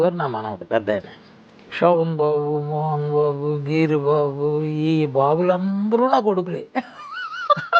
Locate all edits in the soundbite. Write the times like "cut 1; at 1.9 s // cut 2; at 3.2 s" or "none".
cut 1; at 6.7 s